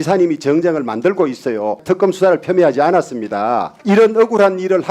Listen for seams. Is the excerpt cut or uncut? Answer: cut